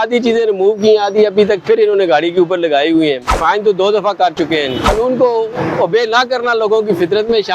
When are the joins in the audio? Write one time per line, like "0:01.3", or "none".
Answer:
0:03.3
0:04.9